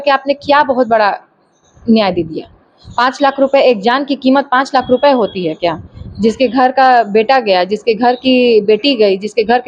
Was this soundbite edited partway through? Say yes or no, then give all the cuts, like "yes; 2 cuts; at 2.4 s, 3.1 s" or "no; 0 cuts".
no; 0 cuts